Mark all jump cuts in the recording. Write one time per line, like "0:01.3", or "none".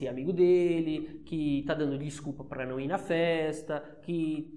none